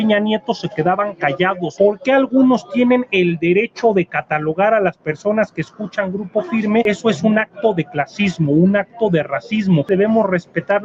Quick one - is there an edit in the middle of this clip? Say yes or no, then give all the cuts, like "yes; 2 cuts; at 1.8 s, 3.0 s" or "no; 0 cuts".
yes; 3 cuts; at 1.7 s, 6.8 s, 9.9 s